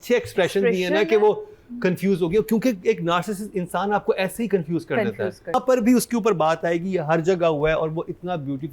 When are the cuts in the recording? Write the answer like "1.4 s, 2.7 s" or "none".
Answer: 5.5 s